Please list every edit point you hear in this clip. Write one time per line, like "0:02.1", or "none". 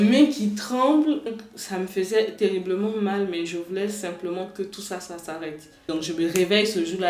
0:01.3
0:05.9